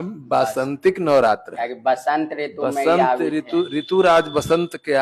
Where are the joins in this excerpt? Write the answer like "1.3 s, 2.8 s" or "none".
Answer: none